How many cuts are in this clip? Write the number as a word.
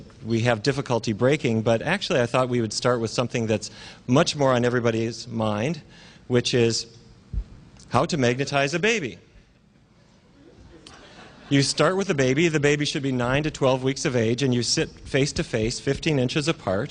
zero